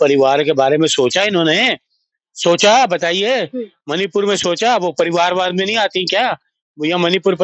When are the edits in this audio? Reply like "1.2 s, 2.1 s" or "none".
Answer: none